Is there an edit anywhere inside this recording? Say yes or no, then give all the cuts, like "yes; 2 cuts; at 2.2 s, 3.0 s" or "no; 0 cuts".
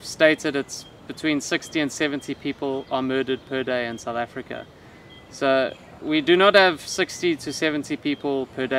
no; 0 cuts